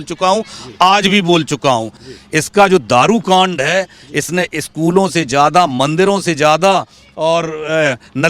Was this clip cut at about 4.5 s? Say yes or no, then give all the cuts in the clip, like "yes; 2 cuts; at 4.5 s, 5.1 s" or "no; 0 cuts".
no; 1 cut; at 1.6 s